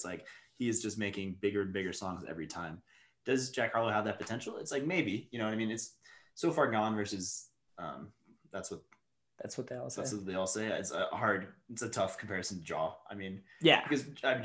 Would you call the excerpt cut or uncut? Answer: uncut